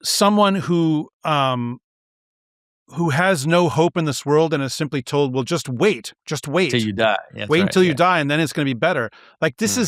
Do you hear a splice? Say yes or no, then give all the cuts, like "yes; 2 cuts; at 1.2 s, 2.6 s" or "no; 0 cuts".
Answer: no; 0 cuts